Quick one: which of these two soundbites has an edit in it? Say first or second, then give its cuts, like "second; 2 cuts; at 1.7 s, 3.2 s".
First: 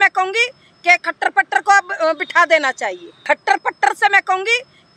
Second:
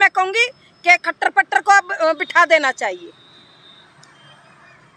first; 1 cut; at 3.2 s